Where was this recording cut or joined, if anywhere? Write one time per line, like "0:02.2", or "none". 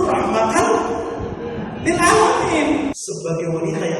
0:02.9